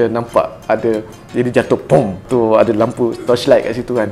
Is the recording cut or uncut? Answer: cut